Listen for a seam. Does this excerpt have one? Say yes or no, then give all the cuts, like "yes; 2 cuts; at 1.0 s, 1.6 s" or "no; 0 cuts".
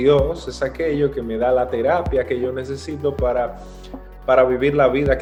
no; 0 cuts